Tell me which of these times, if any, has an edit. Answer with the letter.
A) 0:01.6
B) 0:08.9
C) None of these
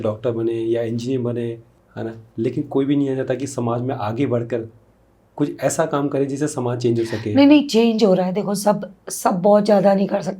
A